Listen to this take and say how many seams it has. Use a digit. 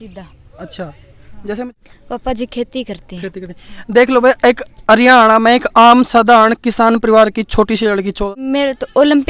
2